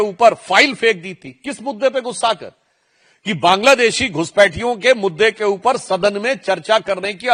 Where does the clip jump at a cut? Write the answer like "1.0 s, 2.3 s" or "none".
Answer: none

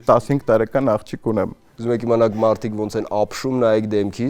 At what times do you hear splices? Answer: 1.7 s

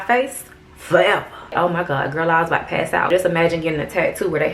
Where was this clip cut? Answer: 1.5 s, 3.1 s

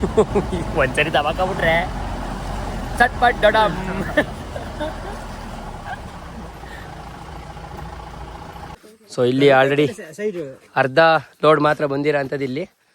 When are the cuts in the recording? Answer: 8.8 s

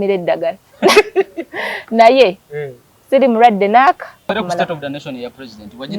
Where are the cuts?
4.3 s

